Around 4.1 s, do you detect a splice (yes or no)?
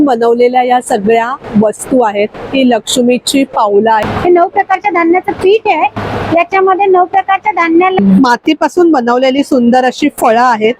yes